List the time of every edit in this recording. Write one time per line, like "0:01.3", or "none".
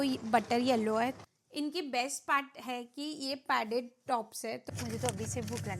0:01.2
0:04.6